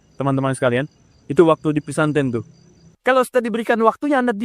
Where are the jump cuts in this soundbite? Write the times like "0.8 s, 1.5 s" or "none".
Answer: 2.8 s